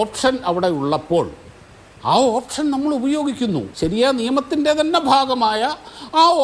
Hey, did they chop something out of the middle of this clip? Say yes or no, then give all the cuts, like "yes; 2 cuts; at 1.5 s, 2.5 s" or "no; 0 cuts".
yes; 1 cut; at 3.7 s